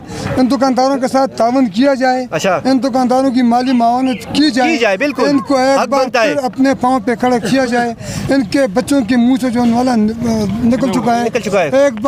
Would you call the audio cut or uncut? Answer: uncut